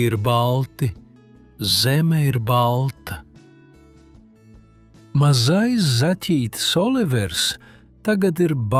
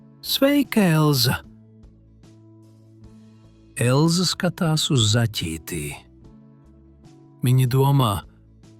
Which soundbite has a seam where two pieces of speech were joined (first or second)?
second